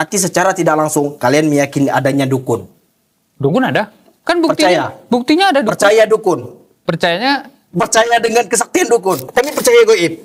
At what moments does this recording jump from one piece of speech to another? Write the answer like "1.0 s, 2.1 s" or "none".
9.2 s